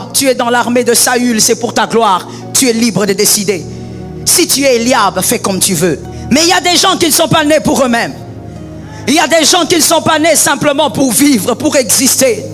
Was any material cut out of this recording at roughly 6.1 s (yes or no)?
yes